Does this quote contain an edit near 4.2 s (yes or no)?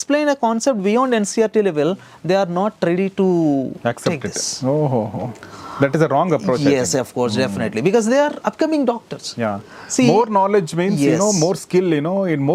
no